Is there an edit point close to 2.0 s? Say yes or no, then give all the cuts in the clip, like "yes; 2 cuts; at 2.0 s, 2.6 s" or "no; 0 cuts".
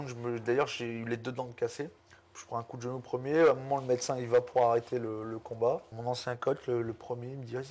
yes; 2 cuts; at 2.0 s, 5.9 s